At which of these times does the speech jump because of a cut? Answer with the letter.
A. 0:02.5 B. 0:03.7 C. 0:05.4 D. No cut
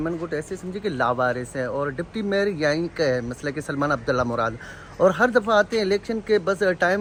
D